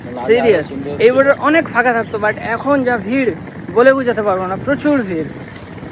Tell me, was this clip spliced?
no; 0 cuts

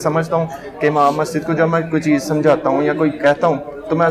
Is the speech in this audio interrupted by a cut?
no; 0 cuts

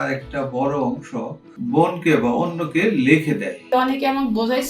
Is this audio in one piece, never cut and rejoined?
no; 2 cuts; at 1.5 s, 3.6 s

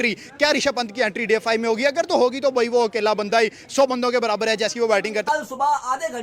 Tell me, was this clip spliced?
yes; 1 cut; at 5.2 s

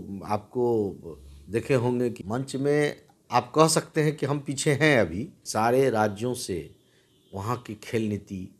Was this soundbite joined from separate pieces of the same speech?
yes; 2 cuts; at 2.2 s, 5.4 s

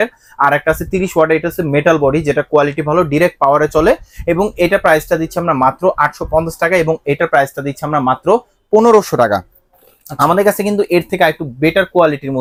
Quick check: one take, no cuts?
yes; 0 cuts

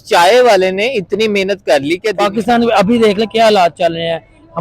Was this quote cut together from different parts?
yes; 1 cut; at 2.2 s

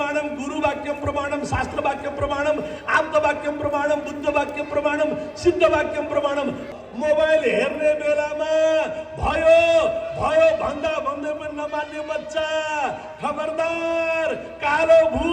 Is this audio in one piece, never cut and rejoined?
no; 1 cut; at 6.7 s

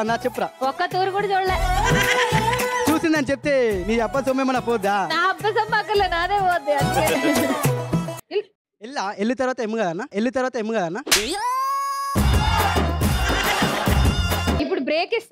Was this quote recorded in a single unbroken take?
no; 1 cut; at 8.2 s

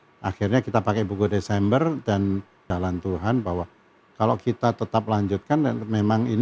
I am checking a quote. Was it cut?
yes; 1 cut; at 2.6 s

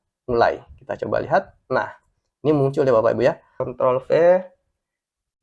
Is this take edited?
yes; 1 cut; at 3.6 s

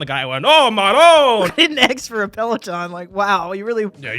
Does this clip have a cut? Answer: yes; 1 cut; at 1.5 s

